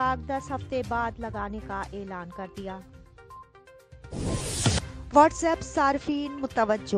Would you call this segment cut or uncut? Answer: cut